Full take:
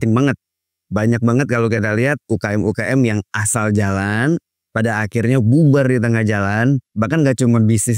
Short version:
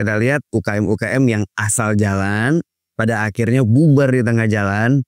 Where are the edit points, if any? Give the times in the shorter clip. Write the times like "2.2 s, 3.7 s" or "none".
none